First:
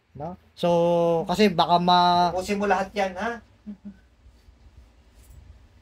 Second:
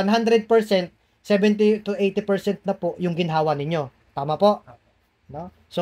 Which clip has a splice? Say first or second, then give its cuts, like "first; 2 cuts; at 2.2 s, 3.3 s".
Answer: first; 1 cut; at 2.3 s